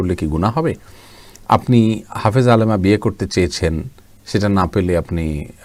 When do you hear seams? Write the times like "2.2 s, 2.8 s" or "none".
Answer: none